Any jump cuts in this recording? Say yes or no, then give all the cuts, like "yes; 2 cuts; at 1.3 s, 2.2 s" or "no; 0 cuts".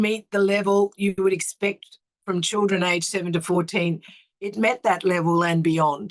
no; 0 cuts